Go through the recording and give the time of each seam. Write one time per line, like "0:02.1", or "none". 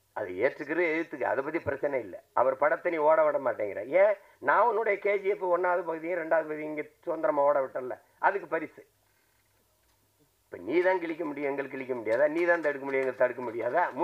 none